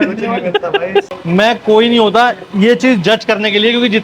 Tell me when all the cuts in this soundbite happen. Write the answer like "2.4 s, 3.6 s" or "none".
1.1 s